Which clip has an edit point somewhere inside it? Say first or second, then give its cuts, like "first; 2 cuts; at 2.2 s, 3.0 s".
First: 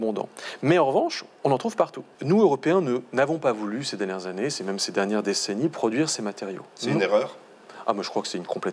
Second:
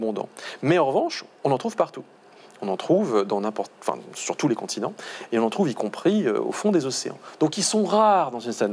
first; 1 cut; at 2.1 s